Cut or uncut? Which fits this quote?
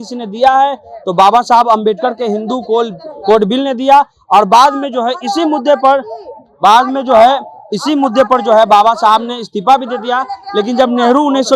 uncut